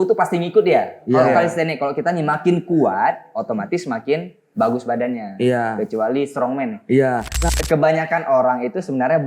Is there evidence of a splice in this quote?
yes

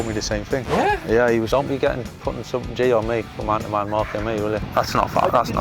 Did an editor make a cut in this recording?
yes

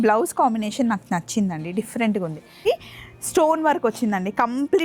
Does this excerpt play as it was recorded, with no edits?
no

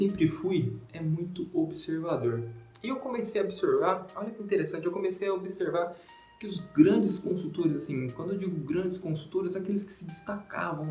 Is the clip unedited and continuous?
yes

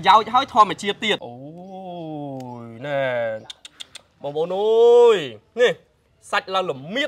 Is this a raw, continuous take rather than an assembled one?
no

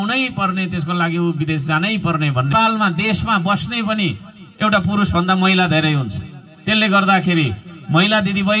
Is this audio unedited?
no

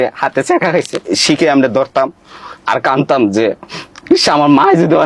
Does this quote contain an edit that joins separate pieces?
yes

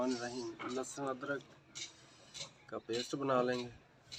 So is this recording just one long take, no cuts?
yes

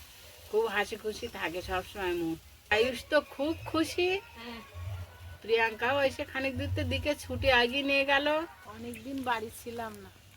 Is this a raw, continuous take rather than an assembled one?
no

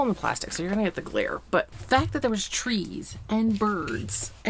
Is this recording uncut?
no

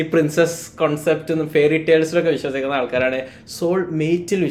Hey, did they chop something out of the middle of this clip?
no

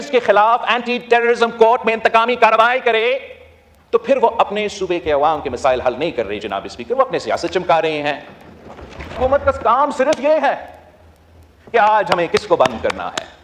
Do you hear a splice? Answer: no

